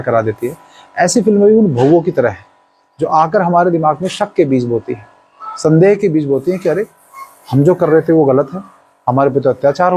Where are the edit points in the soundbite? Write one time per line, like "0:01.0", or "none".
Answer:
none